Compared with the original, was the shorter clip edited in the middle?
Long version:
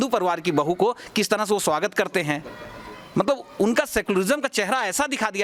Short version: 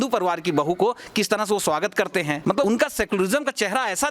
yes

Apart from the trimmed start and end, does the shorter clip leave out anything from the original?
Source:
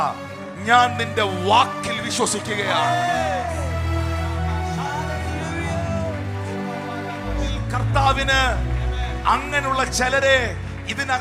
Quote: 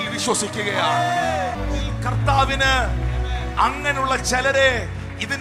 yes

